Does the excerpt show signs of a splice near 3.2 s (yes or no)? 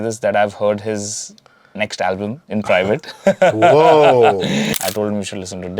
no